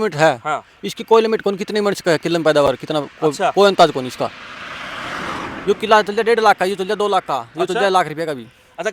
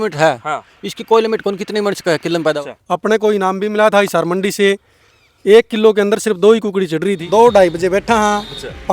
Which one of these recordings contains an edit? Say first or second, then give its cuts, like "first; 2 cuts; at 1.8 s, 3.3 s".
second; 2 cuts; at 2.6 s, 7.2 s